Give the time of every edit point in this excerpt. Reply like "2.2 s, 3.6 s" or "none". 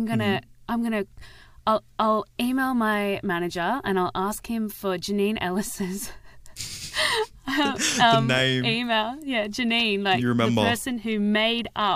none